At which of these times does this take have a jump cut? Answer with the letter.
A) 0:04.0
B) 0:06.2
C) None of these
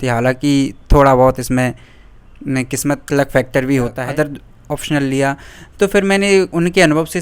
A